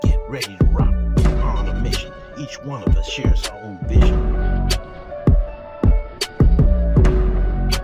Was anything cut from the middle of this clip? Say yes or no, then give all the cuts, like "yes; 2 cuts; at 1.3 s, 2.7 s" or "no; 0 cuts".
no; 0 cuts